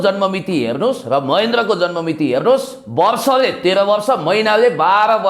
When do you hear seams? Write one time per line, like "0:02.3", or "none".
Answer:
none

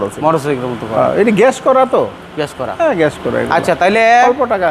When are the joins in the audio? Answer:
none

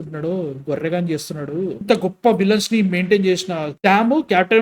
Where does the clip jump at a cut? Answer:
0:01.8

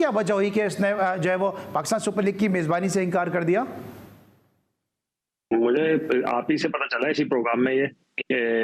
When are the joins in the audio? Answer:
none

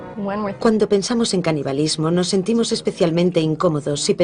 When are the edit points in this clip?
0:01.0

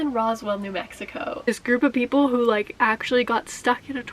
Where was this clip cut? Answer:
0:01.5

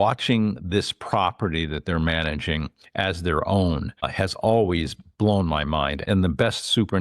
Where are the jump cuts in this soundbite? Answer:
0:04.1
0:06.0

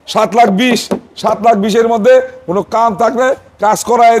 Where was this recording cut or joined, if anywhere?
none

